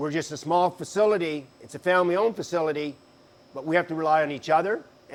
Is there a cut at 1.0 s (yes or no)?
no